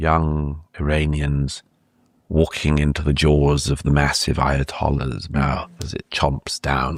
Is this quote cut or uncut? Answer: uncut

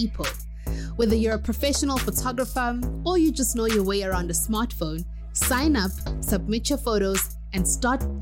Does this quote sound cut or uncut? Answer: uncut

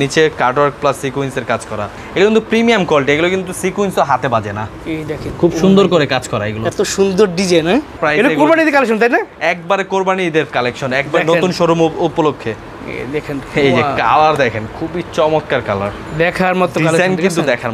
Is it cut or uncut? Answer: cut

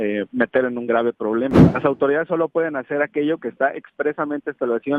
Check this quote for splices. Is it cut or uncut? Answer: cut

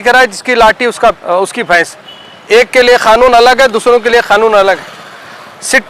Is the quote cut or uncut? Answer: cut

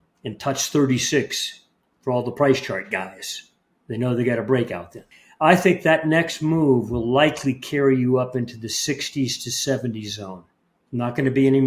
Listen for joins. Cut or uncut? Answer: uncut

